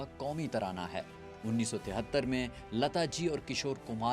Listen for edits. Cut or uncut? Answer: cut